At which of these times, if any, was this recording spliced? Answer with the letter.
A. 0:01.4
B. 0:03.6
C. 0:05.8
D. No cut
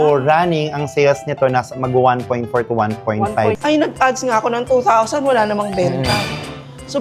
B